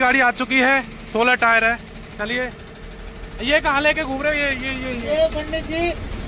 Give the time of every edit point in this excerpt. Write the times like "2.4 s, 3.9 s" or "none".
none